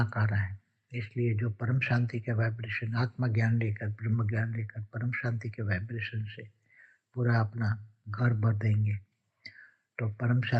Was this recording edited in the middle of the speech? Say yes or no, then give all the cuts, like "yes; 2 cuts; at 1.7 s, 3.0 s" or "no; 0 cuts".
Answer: no; 0 cuts